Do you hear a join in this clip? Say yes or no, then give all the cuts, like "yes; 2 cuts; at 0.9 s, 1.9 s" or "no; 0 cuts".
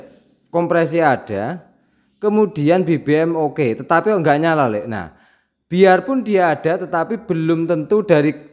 no; 0 cuts